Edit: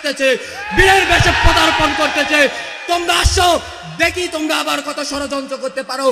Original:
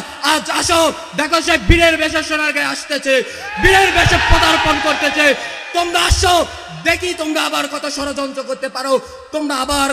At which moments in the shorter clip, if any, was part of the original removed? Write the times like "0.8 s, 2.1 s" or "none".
none